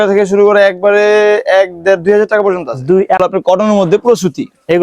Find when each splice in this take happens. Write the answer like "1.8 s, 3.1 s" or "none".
3.2 s

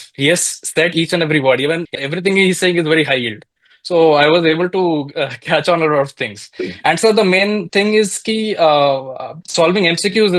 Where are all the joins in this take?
1.9 s

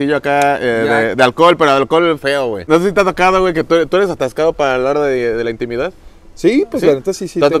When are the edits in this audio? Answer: 2.7 s

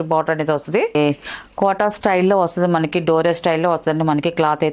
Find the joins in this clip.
1.0 s

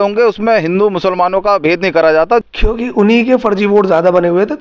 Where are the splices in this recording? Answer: 2.4 s

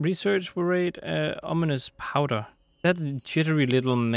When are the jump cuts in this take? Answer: 2.6 s

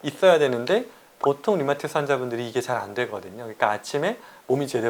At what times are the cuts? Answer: none

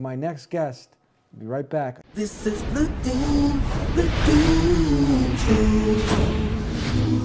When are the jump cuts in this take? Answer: 2.7 s

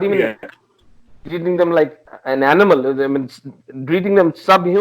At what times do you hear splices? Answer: 2.1 s

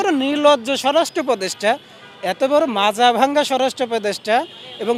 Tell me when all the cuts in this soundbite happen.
none

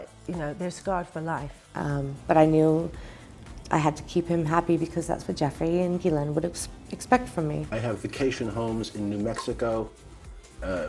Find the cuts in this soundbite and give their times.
1.8 s, 7.6 s

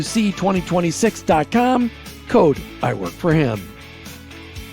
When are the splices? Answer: 3.7 s

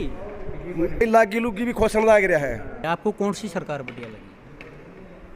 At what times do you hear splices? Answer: 1.0 s, 2.8 s

